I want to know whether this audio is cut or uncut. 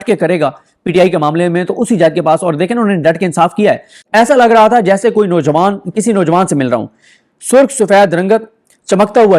cut